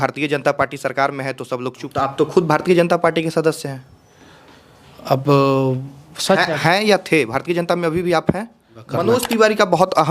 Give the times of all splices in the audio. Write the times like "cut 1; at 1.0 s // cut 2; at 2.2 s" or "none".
cut 1; at 1.9 s // cut 2; at 8.9 s